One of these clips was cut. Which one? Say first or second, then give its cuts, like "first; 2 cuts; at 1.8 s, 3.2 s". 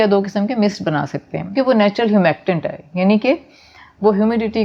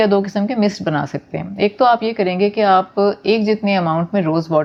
first; 1 cut; at 1.6 s